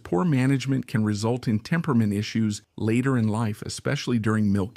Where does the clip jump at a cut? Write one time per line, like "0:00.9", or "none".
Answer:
0:02.7